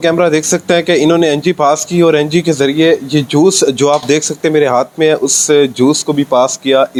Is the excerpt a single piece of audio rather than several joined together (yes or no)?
yes